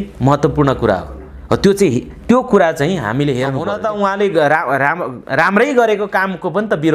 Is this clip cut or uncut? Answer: cut